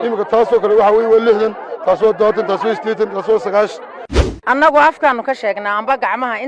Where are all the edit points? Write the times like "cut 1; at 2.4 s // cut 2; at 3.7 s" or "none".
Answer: cut 1; at 4.1 s